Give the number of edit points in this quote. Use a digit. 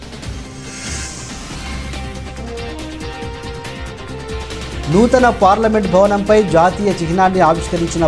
2